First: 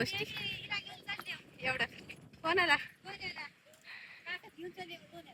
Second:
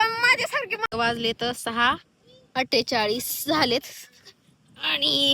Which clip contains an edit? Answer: second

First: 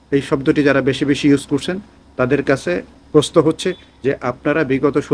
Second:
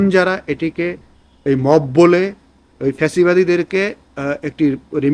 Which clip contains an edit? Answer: first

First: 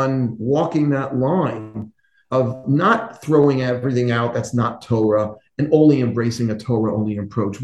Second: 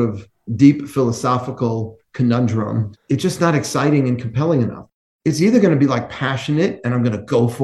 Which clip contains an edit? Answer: second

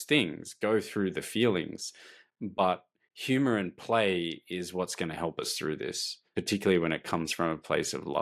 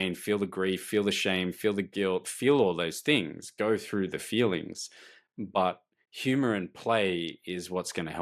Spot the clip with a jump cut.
first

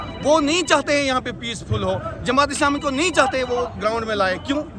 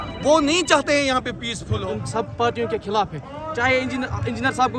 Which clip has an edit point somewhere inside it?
second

